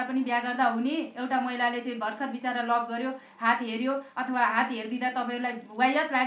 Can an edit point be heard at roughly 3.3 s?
no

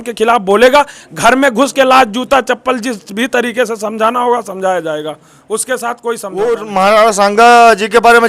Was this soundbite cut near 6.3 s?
yes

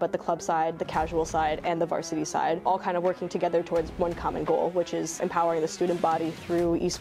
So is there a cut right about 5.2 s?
yes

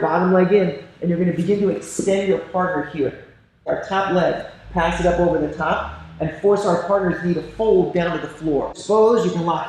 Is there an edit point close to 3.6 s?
yes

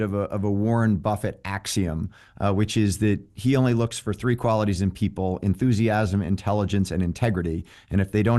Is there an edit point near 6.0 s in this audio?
no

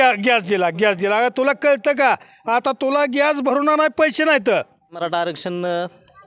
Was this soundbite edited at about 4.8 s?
yes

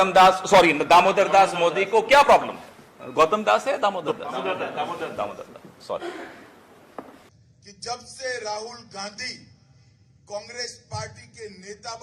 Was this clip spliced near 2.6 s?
no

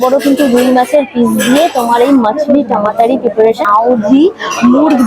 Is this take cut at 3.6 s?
yes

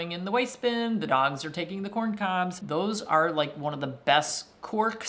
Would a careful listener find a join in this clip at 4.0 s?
no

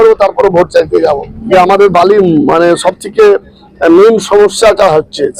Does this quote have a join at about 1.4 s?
yes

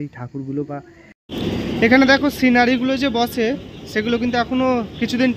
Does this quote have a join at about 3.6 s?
no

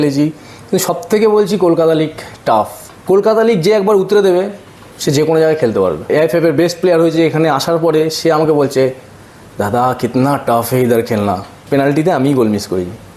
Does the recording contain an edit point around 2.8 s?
yes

